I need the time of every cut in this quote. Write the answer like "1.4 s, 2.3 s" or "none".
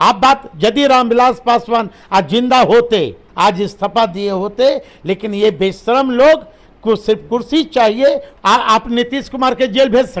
3.2 s, 8.3 s